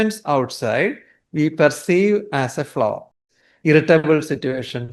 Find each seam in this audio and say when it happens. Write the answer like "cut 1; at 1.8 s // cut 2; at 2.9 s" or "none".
cut 1; at 3.2 s